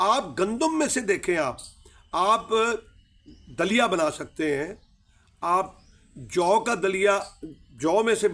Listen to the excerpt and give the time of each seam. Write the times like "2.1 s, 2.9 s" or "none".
none